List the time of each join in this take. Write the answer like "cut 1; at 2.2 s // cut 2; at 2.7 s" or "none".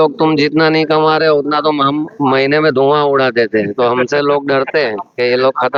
none

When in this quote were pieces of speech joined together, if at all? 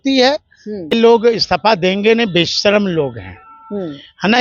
cut 1; at 0.9 s

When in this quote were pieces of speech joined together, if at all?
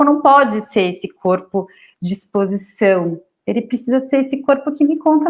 none

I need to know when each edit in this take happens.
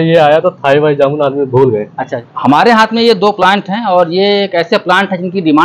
cut 1; at 2.4 s

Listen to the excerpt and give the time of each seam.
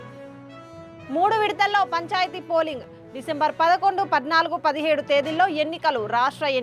cut 1; at 1.0 s

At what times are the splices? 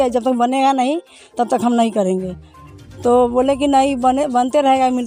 none

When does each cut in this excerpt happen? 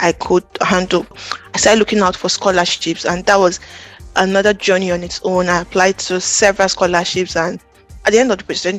cut 1; at 1.1 s // cut 2; at 7.6 s

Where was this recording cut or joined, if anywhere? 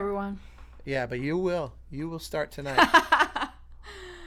none

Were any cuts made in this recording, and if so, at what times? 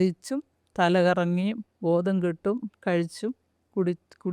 none

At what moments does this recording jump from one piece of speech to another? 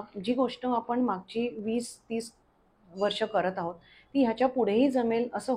none

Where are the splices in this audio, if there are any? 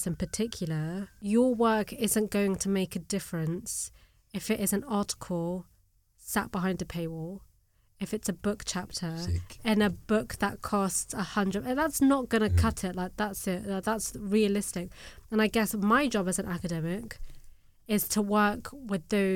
cut 1; at 1.1 s

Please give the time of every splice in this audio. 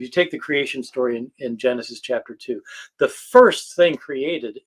none

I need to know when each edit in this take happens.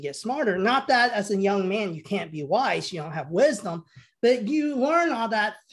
none

